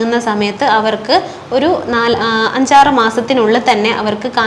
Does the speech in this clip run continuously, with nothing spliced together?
yes; 0 cuts

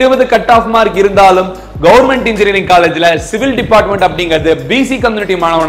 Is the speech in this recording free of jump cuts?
yes; 0 cuts

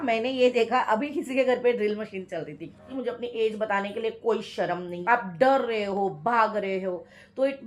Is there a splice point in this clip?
yes; 2 cuts; at 2.9 s, 4.9 s

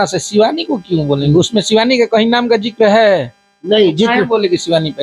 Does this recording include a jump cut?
no; 0 cuts

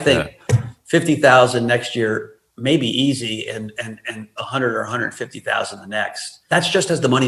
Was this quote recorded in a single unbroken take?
no; 1 cut; at 6.4 s

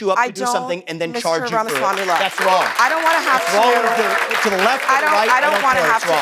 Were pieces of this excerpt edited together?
no; 0 cuts

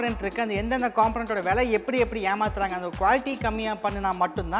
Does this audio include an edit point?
no; 0 cuts

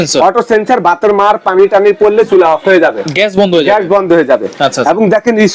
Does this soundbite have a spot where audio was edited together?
no; 0 cuts

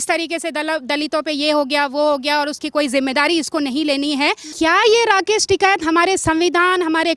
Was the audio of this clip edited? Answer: yes; 1 cut; at 4.5 s

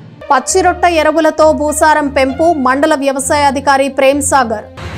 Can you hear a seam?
no; 0 cuts

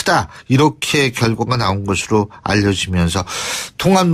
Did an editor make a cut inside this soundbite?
yes; 1 cut; at 1.9 s

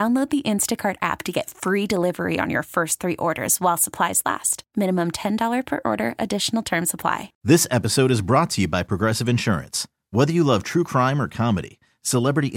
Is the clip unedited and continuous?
no; 1 cut; at 7.3 s

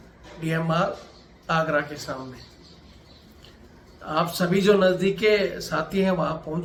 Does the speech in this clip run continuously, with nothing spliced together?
yes; 0 cuts

